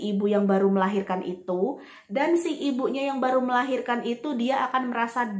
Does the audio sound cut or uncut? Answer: uncut